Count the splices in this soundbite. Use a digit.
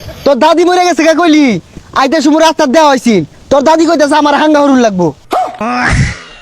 1